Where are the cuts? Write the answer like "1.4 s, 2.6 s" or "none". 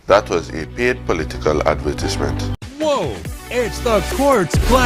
2.6 s